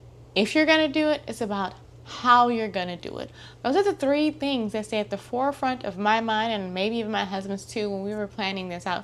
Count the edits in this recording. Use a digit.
0